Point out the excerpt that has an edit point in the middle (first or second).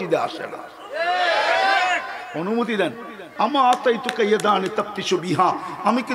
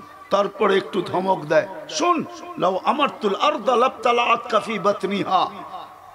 first